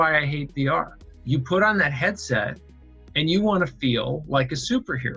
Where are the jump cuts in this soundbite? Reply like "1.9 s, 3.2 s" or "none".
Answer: none